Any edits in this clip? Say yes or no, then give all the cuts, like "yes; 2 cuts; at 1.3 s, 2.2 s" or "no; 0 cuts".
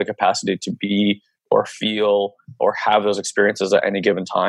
no; 0 cuts